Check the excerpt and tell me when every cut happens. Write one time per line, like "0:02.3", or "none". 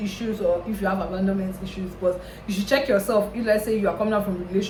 none